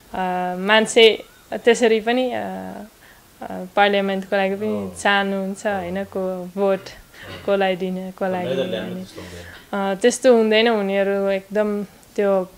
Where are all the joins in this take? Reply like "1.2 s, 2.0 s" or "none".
none